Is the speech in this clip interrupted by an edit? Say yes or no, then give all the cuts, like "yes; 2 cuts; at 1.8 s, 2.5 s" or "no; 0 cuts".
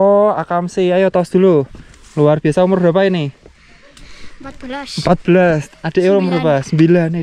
no; 0 cuts